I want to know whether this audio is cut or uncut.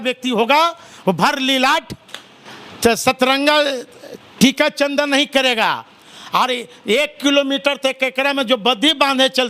uncut